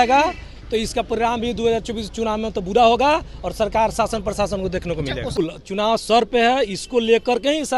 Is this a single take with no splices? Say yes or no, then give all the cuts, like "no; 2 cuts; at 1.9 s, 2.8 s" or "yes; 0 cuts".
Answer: no; 1 cut; at 5.4 s